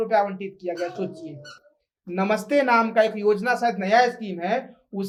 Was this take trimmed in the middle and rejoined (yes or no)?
no